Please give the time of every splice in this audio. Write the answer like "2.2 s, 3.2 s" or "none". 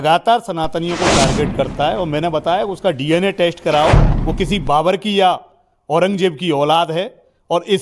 none